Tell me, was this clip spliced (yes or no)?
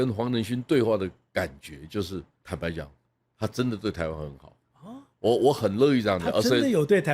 yes